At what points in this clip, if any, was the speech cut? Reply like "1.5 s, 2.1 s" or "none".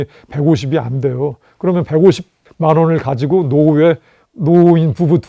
none